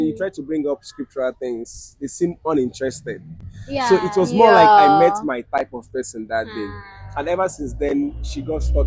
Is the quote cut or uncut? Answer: uncut